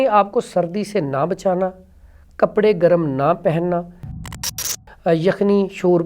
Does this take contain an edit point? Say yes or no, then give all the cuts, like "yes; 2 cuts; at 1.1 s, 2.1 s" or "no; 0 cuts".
yes; 1 cut; at 4.5 s